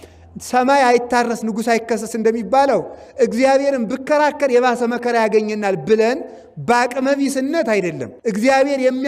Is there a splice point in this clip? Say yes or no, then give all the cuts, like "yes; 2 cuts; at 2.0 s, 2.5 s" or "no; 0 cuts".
yes; 1 cut; at 8.1 s